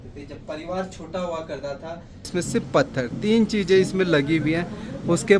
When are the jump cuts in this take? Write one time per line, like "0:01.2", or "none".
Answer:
0:02.3